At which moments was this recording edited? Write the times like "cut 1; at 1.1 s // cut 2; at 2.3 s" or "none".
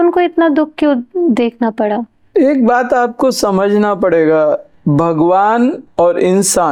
none